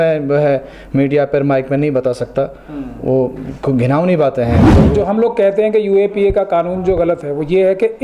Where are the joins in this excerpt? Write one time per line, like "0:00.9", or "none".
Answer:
0:04.9